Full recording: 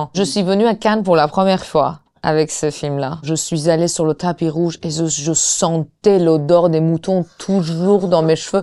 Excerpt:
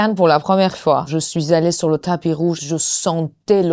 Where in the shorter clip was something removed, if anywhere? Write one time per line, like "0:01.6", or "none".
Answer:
0:01.1
0:02.6